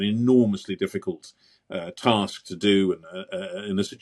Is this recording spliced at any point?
no; 0 cuts

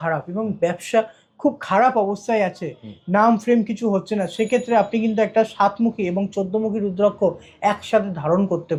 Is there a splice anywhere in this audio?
no; 0 cuts

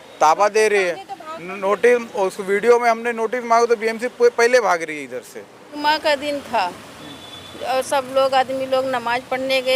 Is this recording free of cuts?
no; 1 cut; at 5.7 s

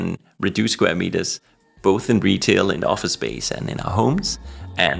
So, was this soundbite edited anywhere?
no; 0 cuts

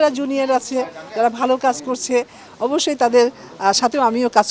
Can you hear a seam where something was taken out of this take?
no; 0 cuts

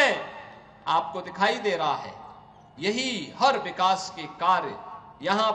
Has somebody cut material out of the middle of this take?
no; 0 cuts

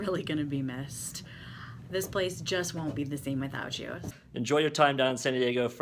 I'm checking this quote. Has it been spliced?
yes; 1 cut; at 4.0 s

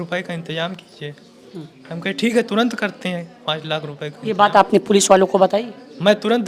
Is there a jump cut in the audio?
no; 0 cuts

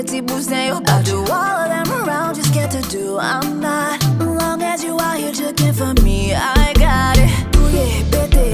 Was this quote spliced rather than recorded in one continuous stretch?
no; 0 cuts

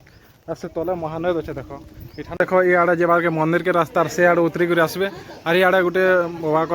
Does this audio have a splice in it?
yes; 1 cut; at 2.3 s

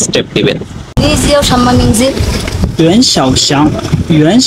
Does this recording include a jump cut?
yes; 1 cut; at 1.0 s

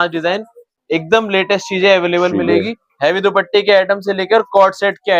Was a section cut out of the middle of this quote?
no; 0 cuts

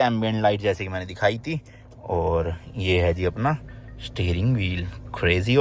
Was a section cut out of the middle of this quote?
no; 0 cuts

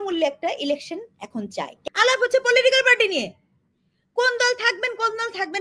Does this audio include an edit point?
yes; 1 cut; at 1.8 s

